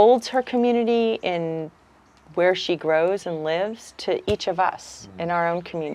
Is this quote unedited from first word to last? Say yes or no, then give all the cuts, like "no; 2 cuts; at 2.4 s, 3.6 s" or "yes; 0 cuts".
yes; 0 cuts